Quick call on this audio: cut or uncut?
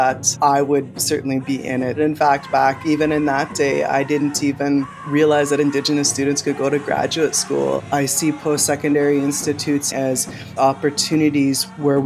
cut